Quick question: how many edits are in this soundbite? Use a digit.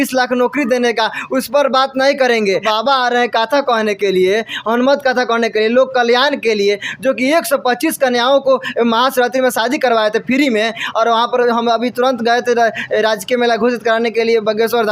1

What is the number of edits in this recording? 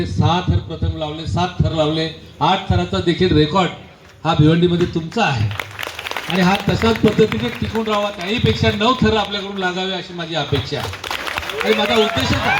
0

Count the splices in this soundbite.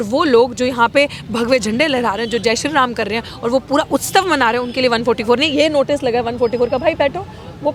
0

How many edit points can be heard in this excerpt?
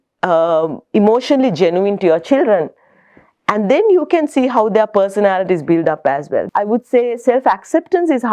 1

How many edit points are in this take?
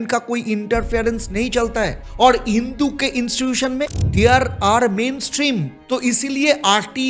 1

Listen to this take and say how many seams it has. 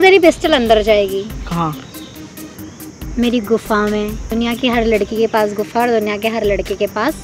1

